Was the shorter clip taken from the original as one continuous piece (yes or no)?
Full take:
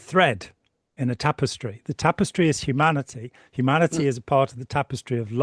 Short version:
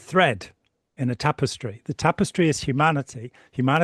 yes